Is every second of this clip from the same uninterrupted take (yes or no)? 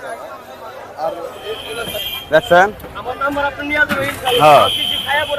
no